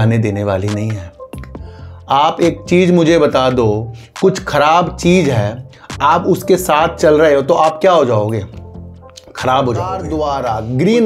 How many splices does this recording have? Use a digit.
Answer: 1